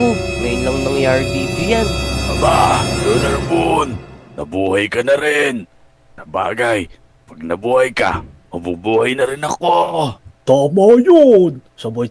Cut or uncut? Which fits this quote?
cut